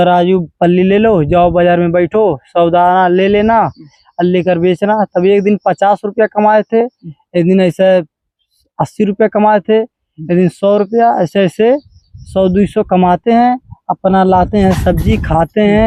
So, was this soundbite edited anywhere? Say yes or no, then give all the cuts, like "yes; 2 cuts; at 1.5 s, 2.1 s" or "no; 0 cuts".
no; 0 cuts